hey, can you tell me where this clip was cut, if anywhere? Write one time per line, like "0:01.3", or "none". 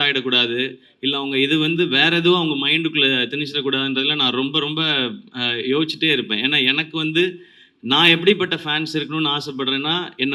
none